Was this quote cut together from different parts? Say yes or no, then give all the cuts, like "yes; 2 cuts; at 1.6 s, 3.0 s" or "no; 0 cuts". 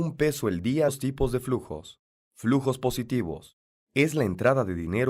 no; 0 cuts